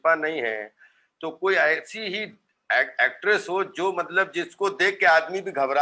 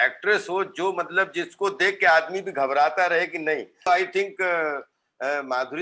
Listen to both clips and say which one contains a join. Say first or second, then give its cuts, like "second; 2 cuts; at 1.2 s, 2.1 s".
second; 1 cut; at 3.9 s